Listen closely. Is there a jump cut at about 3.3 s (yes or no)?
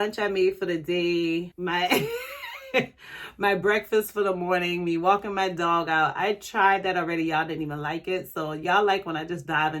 no